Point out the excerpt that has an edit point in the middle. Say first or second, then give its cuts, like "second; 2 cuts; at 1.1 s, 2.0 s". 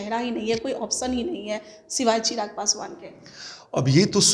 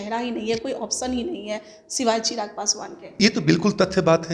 second; 1 cut; at 3.2 s